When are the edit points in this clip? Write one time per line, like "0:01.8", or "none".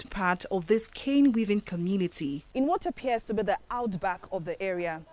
0:02.4